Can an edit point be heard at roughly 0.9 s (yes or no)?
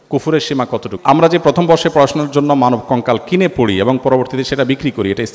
yes